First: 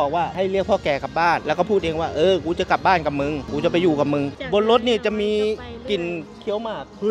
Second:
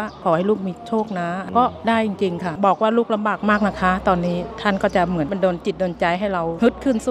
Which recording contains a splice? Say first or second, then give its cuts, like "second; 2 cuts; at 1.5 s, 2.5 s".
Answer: second; 1 cut; at 2.6 s